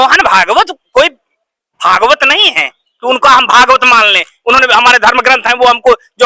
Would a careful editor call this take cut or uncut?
uncut